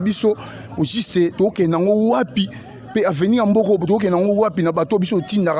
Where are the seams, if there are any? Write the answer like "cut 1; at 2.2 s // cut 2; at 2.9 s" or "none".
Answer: none